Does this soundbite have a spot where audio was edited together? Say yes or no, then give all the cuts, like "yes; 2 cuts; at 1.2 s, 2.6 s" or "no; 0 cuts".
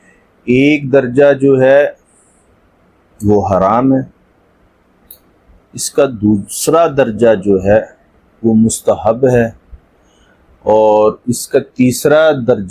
no; 0 cuts